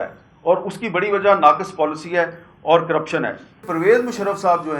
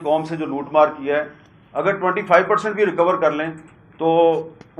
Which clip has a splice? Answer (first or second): first